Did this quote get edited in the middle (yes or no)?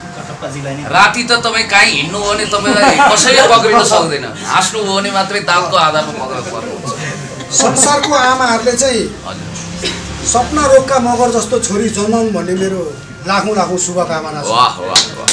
no